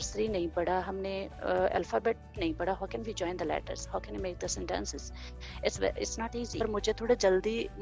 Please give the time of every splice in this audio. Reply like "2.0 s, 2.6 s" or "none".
6.7 s